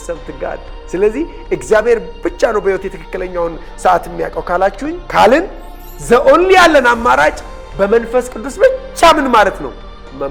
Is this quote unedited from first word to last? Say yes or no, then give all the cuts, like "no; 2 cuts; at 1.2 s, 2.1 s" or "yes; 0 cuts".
yes; 0 cuts